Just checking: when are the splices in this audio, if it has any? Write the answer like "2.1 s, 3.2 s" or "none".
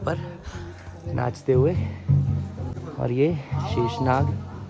none